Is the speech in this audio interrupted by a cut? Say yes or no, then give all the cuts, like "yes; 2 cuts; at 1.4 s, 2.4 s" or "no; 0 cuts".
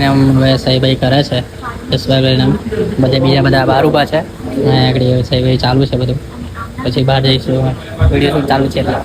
no; 0 cuts